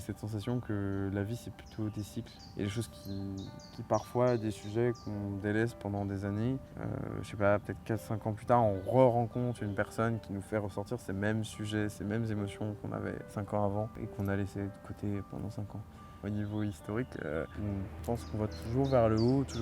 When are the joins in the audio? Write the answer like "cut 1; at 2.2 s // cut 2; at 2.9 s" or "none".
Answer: cut 1; at 2.4 s // cut 2; at 6.7 s // cut 3; at 13.3 s // cut 4; at 14.0 s // cut 5; at 16.1 s // cut 6; at 17.6 s

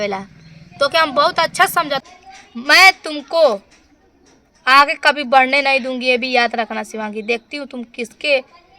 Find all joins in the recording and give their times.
cut 1; at 2.0 s

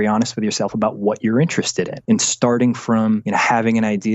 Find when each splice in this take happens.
cut 1; at 2.0 s // cut 2; at 3.2 s

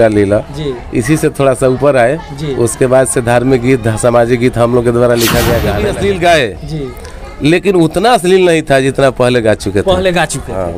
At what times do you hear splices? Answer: cut 1; at 5.7 s

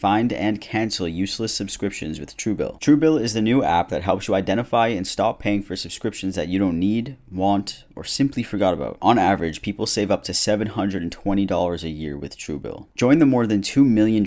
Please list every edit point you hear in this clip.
cut 1; at 12.8 s

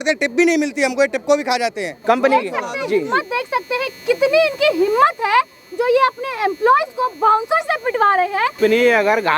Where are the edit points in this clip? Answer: cut 1; at 1.9 s // cut 2; at 8.6 s

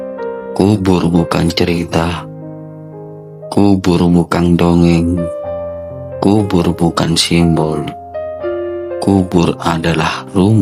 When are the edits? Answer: none

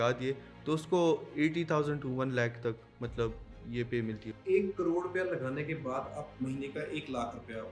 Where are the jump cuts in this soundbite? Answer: none

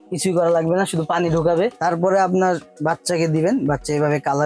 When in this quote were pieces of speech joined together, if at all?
cut 1; at 1.8 s

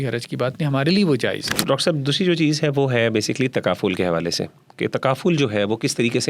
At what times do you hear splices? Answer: cut 1; at 1.5 s

